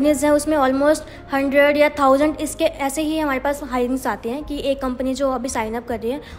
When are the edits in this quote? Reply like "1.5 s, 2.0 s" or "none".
none